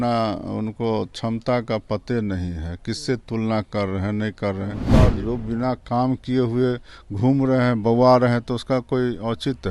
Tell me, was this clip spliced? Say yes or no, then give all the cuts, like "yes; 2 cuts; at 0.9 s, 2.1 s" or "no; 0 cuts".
yes; 1 cut; at 4.9 s